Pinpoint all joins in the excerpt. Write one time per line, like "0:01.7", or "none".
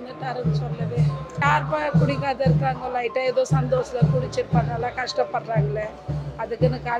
0:01.4